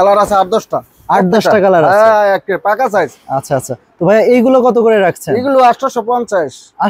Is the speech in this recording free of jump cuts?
yes; 0 cuts

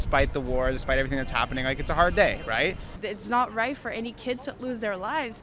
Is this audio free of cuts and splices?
no; 1 cut; at 3.0 s

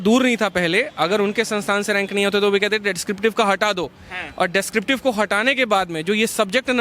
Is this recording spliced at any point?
no; 0 cuts

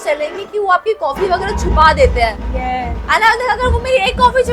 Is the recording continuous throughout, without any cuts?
yes; 0 cuts

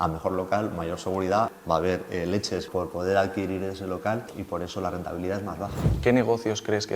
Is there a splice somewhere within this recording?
yes; 4 cuts; at 1.6 s, 2.7 s, 4.3 s, 5.9 s

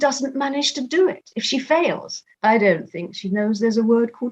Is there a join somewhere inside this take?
yes; 1 cut; at 2.3 s

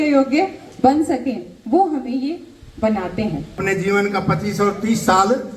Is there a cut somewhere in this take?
yes; 1 cut; at 3.6 s

